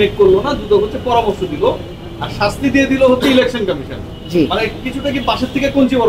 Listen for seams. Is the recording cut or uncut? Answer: uncut